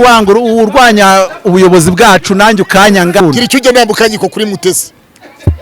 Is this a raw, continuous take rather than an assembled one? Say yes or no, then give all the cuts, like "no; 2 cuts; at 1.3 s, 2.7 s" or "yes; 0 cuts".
no; 1 cut; at 3.2 s